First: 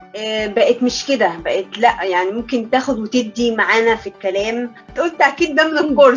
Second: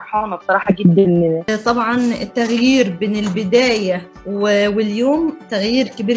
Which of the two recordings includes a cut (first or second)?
second